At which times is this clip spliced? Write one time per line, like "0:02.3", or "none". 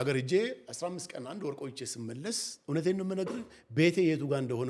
none